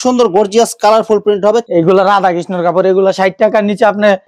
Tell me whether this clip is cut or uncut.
cut